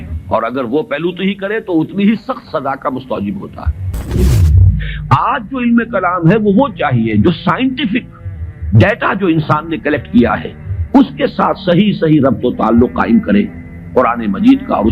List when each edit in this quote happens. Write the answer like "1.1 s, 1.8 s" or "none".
4.3 s